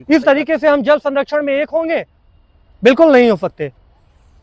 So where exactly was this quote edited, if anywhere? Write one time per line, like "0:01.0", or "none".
none